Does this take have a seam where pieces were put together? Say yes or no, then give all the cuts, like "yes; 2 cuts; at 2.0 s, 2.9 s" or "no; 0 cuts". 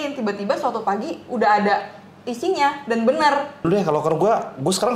yes; 1 cut; at 3.6 s